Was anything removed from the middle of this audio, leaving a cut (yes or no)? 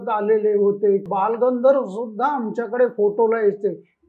yes